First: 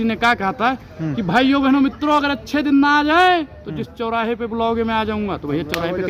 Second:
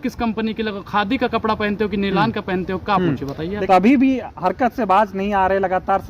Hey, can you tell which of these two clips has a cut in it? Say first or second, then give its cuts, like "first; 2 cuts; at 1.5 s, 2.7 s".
second; 1 cut; at 3.5 s